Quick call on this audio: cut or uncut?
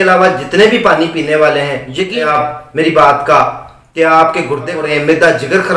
cut